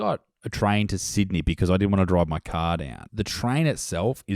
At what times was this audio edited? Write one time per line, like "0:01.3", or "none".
0:03.0